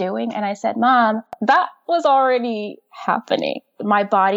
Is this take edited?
yes; 1 cut; at 1.3 s

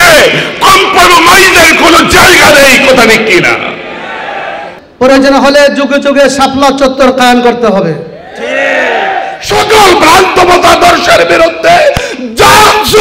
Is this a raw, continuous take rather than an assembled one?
no; 2 cuts; at 4.7 s, 9.4 s

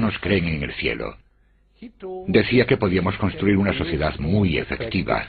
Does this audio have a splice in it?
yes; 1 cut; at 3.4 s

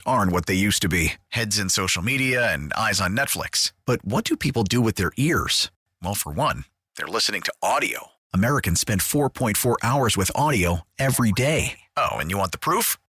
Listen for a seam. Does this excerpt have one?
no; 0 cuts

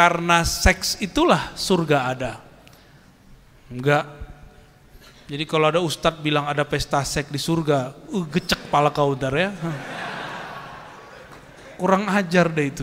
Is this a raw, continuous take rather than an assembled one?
yes; 0 cuts

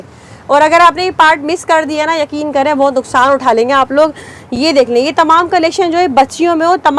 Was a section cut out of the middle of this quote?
no; 0 cuts

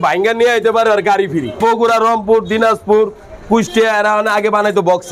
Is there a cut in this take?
yes; 1 cut; at 1.6 s

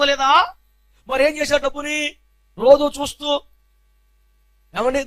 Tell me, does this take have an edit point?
yes; 1 cut; at 0.9 s

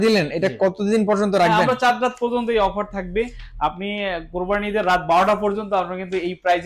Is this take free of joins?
yes; 0 cuts

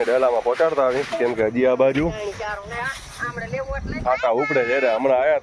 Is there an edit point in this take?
no; 0 cuts

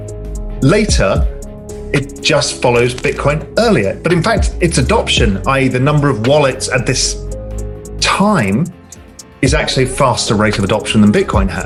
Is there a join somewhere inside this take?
no; 0 cuts

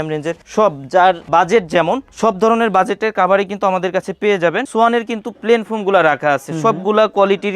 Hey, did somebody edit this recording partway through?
yes; 1 cut; at 4.6 s

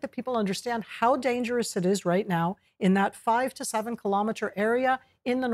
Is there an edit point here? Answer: yes; 1 cut; at 3.6 s

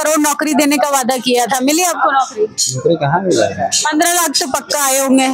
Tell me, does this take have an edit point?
no; 0 cuts

